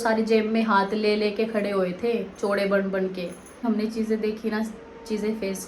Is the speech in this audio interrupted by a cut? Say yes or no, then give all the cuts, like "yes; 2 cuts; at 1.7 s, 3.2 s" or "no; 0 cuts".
yes; 1 cut; at 3.6 s